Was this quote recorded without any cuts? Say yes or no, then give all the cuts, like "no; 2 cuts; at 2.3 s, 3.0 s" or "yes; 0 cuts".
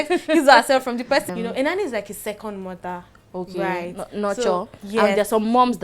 no; 1 cut; at 1.3 s